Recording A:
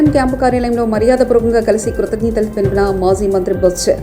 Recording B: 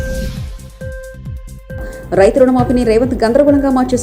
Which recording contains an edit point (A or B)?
B